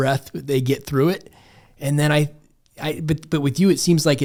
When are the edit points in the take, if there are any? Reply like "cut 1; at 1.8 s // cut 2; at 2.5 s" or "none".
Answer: none